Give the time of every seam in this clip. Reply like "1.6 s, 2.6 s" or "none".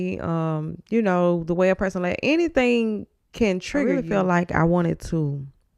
4.0 s